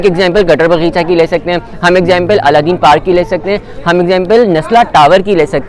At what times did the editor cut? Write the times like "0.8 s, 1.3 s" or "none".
none